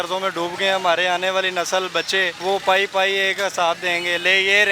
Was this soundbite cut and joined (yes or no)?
yes